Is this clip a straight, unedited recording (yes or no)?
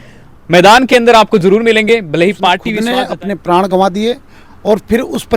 no